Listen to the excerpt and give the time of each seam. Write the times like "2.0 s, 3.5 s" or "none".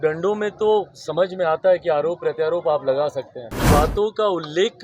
3.5 s